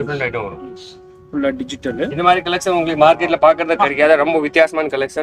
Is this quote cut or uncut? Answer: uncut